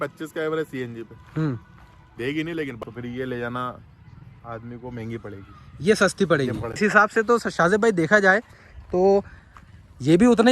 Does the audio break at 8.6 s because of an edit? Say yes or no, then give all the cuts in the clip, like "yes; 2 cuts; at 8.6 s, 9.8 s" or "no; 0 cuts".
no; 2 cuts; at 2.8 s, 6.8 s